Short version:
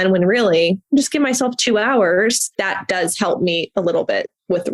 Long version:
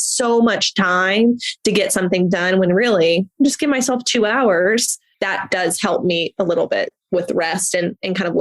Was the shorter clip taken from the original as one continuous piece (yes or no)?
no